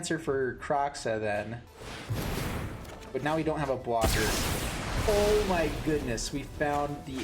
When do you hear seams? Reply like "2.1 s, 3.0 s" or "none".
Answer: 1.7 s

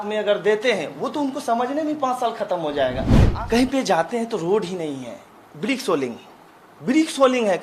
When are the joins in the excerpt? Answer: 3.2 s

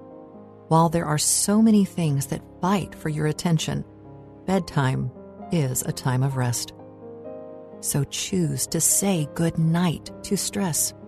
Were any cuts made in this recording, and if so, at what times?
6.6 s, 7.9 s

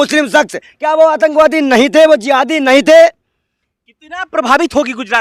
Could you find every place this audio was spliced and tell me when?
none

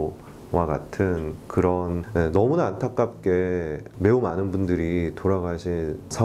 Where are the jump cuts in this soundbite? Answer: none

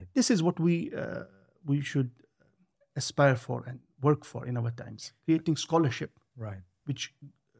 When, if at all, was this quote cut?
none

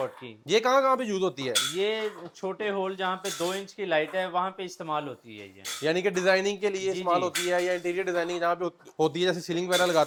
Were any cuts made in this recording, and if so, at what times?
none

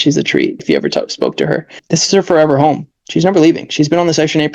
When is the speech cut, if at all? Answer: 1.8 s

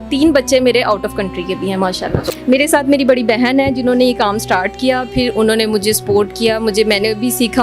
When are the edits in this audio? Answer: 2.4 s

